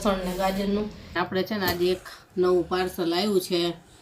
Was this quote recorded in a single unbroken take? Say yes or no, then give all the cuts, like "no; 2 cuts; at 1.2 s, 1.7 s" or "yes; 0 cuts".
no; 1 cut; at 1.2 s